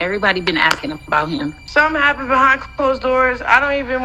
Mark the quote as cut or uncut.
cut